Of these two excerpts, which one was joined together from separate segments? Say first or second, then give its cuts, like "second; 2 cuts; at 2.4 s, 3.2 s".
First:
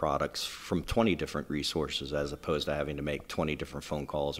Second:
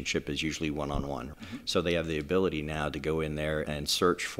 second; 2 cuts; at 1.3 s, 3.7 s